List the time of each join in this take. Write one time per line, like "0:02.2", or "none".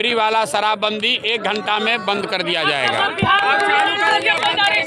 none

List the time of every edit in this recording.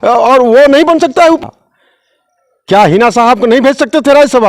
0:01.4

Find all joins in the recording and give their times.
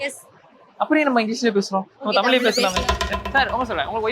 0:03.0

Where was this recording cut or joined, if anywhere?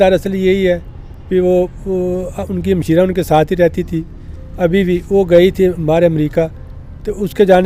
none

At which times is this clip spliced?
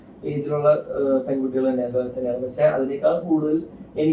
none

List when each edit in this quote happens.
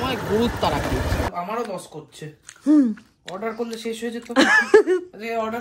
0:01.3

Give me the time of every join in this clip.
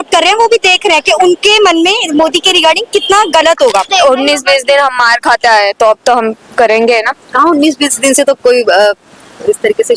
0:03.9

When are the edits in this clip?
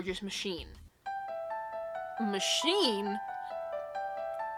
none

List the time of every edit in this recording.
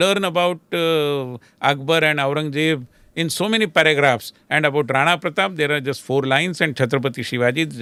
none

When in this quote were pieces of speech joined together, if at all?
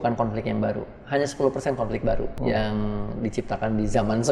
0:02.3

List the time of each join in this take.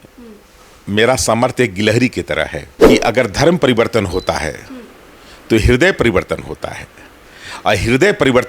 0:02.7

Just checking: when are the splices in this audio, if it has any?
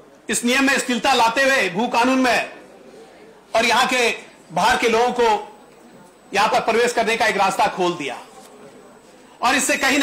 none

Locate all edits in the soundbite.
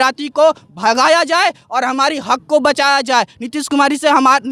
none

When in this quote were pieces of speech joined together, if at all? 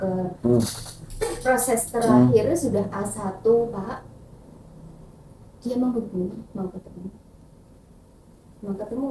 none

